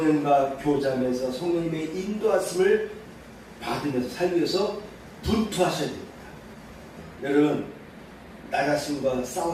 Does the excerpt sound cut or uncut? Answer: uncut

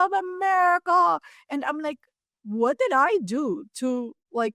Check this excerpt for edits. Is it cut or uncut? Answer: uncut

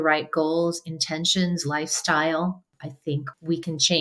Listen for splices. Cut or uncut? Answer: cut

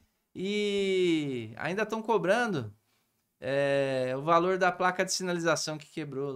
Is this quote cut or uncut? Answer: uncut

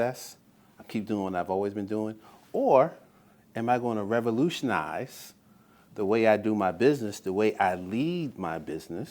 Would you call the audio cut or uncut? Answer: uncut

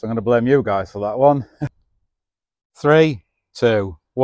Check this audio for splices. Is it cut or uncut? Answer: cut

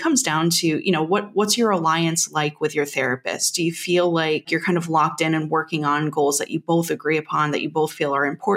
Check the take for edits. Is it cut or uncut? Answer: cut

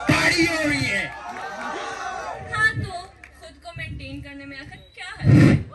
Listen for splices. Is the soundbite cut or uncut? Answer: uncut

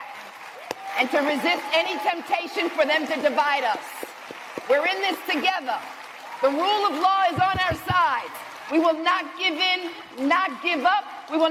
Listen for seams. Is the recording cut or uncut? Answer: uncut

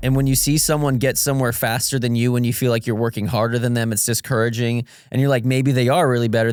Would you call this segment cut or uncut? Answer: uncut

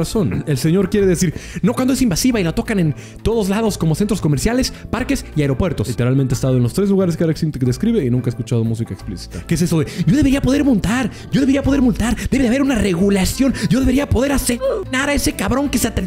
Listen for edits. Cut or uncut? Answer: cut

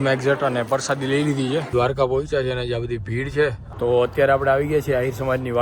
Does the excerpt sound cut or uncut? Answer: cut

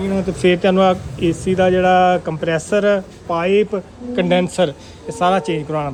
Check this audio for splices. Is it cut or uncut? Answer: uncut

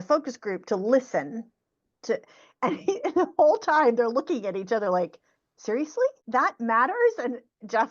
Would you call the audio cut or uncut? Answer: cut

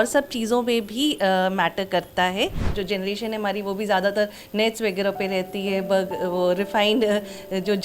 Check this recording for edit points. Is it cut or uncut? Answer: cut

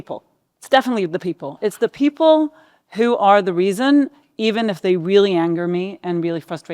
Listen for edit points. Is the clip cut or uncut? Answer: cut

